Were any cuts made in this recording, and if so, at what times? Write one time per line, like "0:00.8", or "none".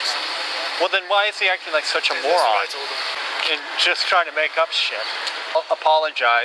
0:03.2
0:05.5